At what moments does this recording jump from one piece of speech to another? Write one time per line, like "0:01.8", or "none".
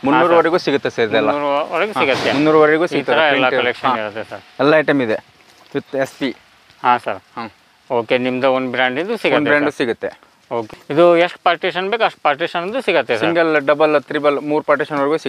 none